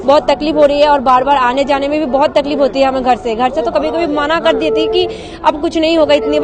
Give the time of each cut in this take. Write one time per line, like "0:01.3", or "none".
none